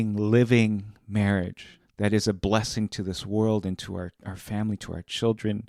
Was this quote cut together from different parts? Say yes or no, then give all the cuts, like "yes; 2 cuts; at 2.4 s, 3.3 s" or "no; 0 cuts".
yes; 1 cut; at 1.6 s